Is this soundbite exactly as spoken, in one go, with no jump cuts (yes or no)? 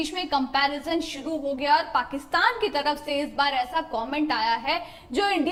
yes